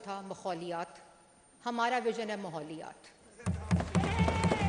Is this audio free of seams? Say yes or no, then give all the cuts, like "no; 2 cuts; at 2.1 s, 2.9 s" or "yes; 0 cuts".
yes; 0 cuts